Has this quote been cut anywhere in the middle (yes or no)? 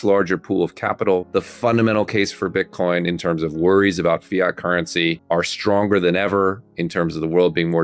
yes